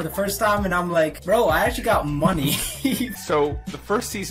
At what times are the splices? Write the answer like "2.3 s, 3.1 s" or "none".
1.2 s, 3.1 s